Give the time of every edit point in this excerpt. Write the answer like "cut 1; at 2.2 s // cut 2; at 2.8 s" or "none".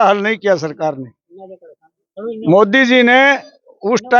none